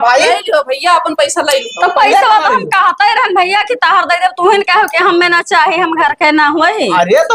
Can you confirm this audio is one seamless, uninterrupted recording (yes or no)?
yes